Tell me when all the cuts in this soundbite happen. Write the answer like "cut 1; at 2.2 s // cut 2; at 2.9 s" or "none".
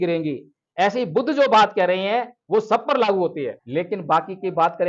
cut 1; at 3.6 s